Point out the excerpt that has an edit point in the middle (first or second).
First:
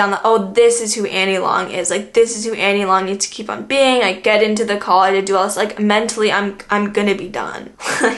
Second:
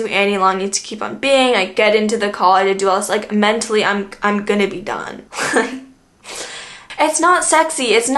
second